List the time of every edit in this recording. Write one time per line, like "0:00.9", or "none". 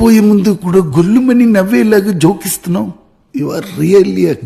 none